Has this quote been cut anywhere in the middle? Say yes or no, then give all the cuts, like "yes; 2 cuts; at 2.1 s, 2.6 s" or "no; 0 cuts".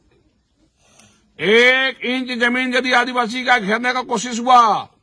no; 0 cuts